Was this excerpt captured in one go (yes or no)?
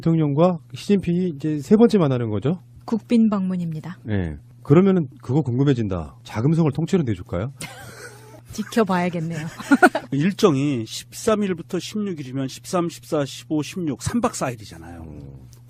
yes